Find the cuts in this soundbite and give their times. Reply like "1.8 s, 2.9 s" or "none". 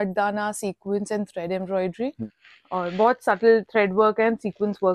2.3 s